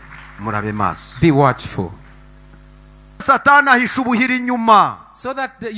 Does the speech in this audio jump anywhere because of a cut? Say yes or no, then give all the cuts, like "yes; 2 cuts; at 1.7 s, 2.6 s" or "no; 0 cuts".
yes; 1 cut; at 3.2 s